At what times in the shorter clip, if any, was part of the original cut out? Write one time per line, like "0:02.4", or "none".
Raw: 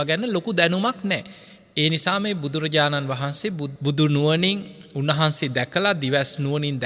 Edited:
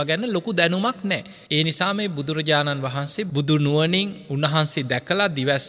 0:01.3
0:03.3
0:04.2

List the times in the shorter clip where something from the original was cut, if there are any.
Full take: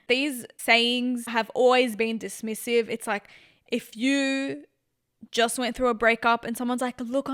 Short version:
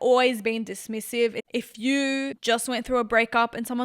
0:01.4
0:02.4

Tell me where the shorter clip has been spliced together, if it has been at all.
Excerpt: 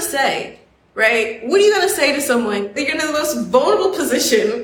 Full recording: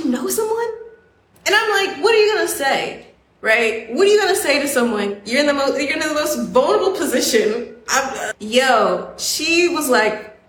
0:02.8

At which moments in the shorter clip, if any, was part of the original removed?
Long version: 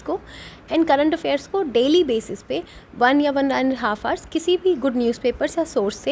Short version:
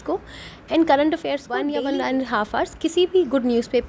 0:01.6

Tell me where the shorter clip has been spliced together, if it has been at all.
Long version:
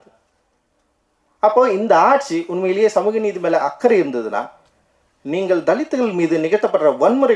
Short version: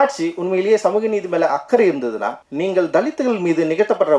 0:02.4

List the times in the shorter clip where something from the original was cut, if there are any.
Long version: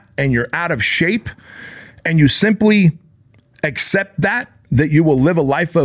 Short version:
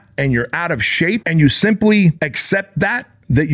0:01.2
0:02.3

